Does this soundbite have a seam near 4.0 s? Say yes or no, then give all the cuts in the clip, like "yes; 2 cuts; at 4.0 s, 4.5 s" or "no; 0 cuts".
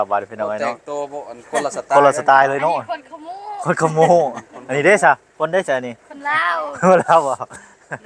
no; 0 cuts